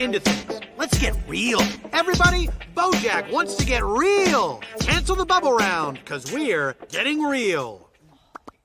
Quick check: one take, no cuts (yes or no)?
yes